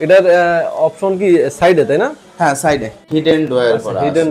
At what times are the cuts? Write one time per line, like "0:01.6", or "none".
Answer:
0:03.0

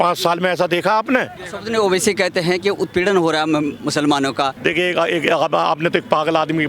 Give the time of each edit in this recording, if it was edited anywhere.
0:01.4
0:04.5

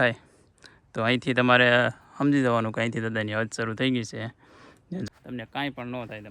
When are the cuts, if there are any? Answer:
0:05.1

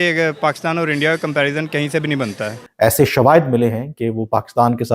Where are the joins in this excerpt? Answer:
0:02.6

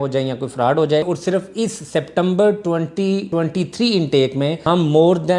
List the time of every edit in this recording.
0:01.1
0:03.3
0:04.6

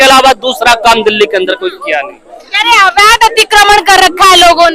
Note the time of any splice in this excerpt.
none

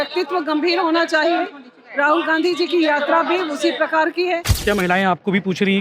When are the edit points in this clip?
0:04.5

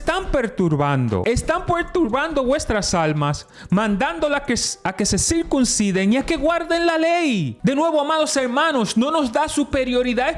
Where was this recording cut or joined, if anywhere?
0:01.2
0:07.5

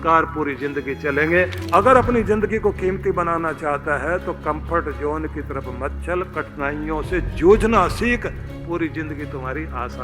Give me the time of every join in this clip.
0:01.6

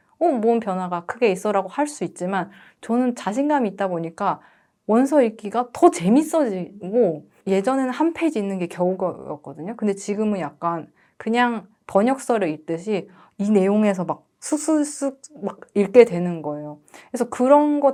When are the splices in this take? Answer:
none

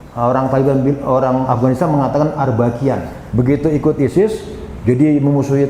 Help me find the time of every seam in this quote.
0:03.2

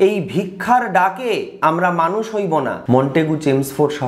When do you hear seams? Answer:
0:01.5
0:02.8

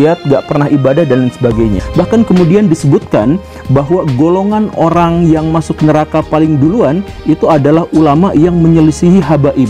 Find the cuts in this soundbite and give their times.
0:01.8

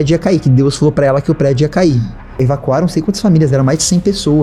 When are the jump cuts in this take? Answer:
0:02.4

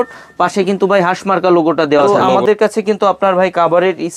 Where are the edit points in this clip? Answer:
0:02.3

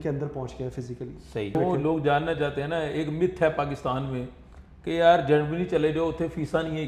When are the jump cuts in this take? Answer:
0:01.6

